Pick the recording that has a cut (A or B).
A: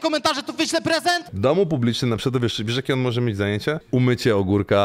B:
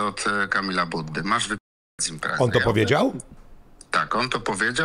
A